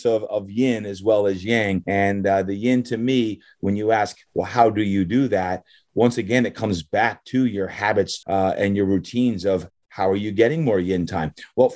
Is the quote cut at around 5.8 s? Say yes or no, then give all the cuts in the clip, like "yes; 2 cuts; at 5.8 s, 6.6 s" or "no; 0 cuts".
no; 2 cuts; at 1.8 s, 8.2 s